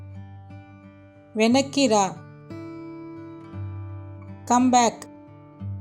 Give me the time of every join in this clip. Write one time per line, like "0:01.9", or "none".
0:01.0
0:02.2
0:04.0
0:04.9